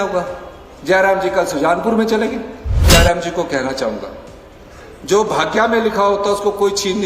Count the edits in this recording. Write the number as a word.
one